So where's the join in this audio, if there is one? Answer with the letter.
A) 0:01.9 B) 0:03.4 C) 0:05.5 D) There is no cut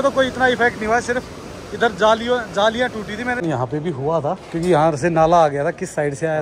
B